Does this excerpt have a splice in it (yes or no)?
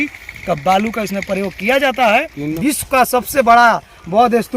yes